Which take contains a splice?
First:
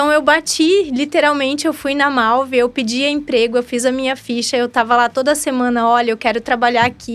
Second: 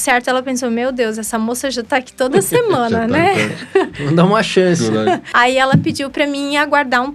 second; 1 cut; at 5.3 s

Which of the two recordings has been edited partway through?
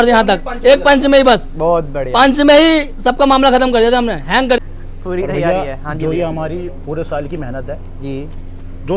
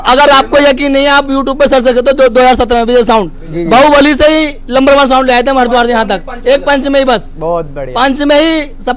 first; 1 cut; at 4.6 s

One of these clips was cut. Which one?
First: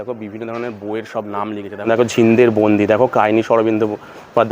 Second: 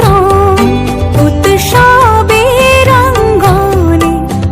first; 1 cut; at 1.9 s

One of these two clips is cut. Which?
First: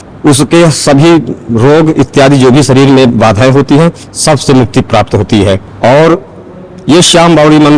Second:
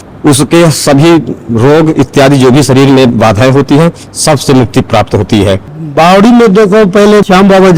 second; 1 cut; at 5.7 s

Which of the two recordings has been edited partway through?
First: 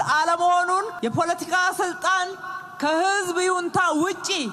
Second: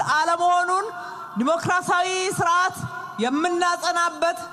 first; 1 cut; at 0.9 s

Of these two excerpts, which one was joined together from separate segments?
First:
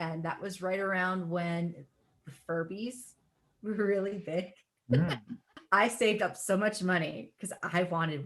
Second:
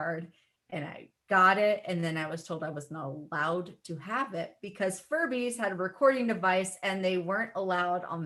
first; 1 cut; at 5.5 s

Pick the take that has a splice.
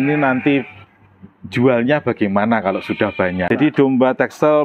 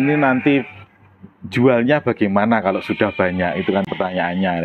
first; 1 cut; at 3.5 s

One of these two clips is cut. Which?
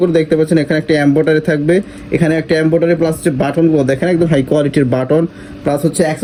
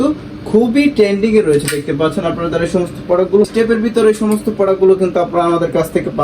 second; 1 cut; at 3.5 s

